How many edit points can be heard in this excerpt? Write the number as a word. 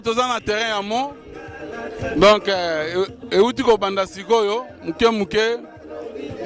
zero